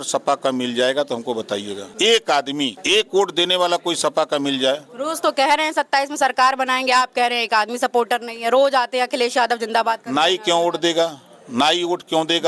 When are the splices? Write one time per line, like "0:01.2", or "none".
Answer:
0:01.8
0:02.8